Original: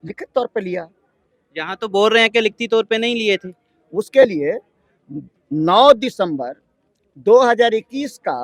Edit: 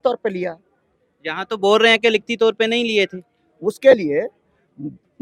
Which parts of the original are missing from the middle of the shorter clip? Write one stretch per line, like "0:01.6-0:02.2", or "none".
none